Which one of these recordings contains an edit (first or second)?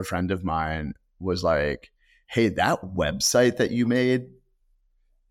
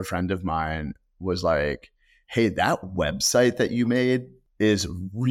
second